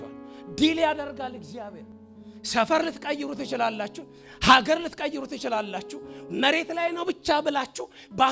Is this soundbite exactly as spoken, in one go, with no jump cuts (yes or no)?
yes